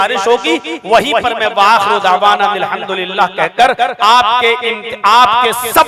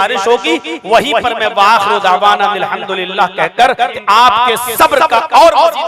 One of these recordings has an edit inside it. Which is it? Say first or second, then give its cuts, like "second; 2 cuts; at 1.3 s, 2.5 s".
second; 1 cut; at 3.9 s